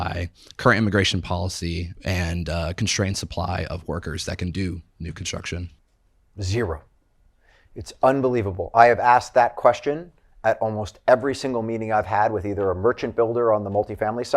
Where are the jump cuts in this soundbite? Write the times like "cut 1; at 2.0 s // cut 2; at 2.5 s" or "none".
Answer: cut 1; at 1.9 s // cut 2; at 5.8 s